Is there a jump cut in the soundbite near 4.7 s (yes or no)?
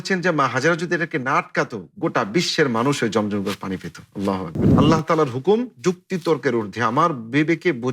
yes